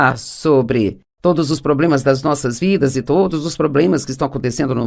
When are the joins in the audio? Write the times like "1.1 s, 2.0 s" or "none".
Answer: 3.7 s